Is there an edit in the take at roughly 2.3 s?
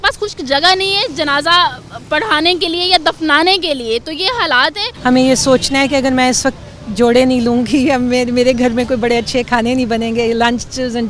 no; 1 cut; at 4.9 s

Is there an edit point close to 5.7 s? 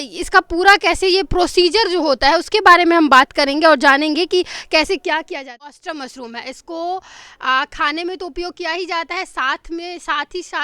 yes; 1 cut; at 5.7 s

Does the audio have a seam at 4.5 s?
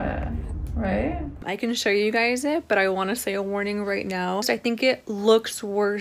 yes; 2 cuts; at 1.5 s, 4.5 s

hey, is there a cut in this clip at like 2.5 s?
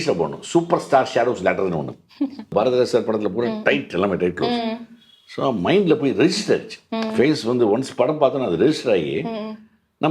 yes; 1 cut; at 2.5 s

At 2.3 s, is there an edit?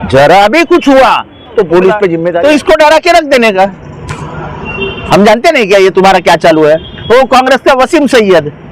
yes; 1 cut; at 2.3 s

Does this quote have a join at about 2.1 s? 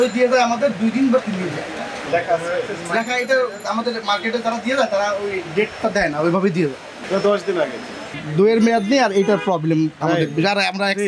yes; 3 cuts; at 2.1 s, 7.0 s, 8.2 s

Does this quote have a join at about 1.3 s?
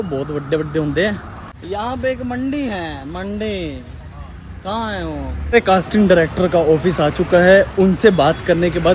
yes; 2 cuts; at 1.3 s, 5.6 s

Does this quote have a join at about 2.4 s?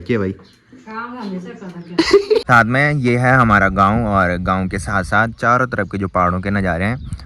yes; 1 cut; at 2.4 s

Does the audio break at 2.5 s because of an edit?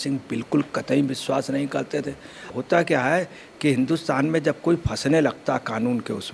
yes; 1 cut; at 2.5 s

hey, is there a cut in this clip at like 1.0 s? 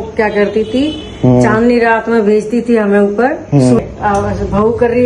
no; 1 cut; at 3.8 s

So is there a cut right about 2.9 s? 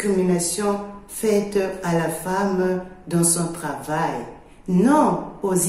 yes; 1 cut; at 2.9 s

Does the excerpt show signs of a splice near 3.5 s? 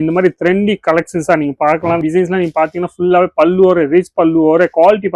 no; 1 cut; at 2.0 s

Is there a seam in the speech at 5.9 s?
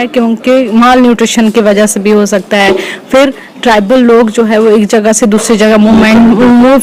no; 0 cuts

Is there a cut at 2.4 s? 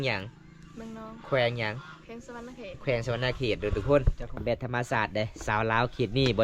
no; 1 cut; at 4.4 s

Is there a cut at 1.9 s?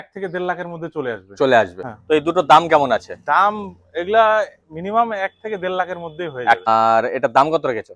yes; 2 cuts; at 1.9 s, 6.7 s

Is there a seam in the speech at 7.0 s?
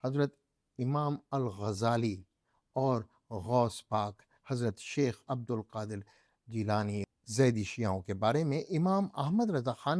yes; 1 cut; at 7.0 s

